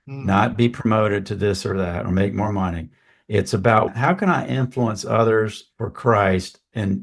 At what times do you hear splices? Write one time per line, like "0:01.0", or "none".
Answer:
0:03.9